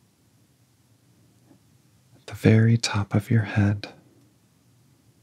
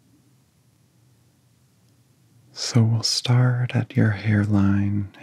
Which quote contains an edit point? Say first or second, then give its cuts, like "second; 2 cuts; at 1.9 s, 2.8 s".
first; 1 cut; at 1.0 s